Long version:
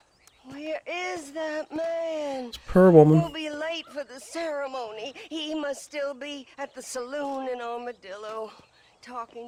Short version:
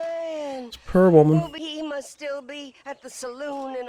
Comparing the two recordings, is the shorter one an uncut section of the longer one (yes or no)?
no